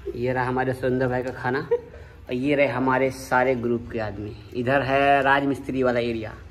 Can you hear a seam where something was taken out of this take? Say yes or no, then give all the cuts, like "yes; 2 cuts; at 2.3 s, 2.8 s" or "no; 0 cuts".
no; 0 cuts